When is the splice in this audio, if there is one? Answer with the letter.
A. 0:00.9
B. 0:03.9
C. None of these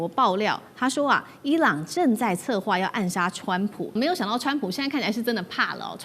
B